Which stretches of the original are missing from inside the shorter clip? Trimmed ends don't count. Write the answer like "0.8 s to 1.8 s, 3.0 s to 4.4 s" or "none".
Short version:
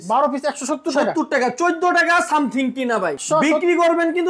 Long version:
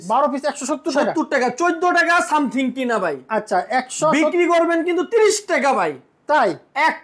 3.2 s to 3.9 s